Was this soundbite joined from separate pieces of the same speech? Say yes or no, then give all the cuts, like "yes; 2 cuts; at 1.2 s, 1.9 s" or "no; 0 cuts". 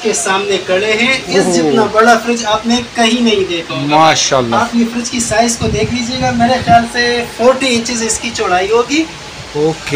no; 0 cuts